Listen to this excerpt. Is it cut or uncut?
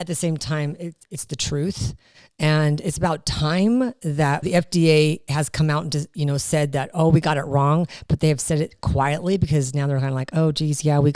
uncut